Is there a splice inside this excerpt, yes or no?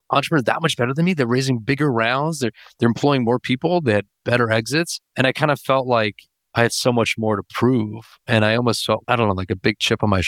yes